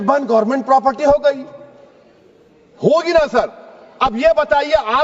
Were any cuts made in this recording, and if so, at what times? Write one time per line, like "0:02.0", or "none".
none